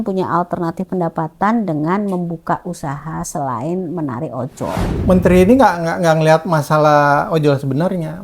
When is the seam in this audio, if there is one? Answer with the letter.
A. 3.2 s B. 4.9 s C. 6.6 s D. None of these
B